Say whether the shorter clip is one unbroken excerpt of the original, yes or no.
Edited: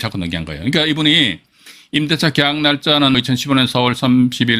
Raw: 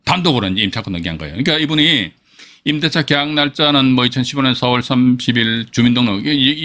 no